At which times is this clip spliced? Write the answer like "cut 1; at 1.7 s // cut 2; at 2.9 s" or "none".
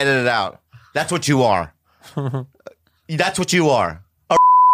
none